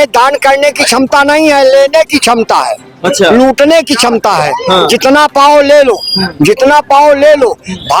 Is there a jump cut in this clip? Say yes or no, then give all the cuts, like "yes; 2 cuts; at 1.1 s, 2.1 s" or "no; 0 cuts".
no; 0 cuts